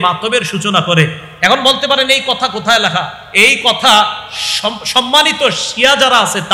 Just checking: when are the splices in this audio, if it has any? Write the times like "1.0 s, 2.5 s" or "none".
none